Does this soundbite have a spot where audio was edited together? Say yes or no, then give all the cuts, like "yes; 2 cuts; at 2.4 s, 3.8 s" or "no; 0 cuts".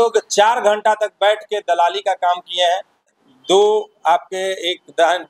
yes; 1 cut; at 3.1 s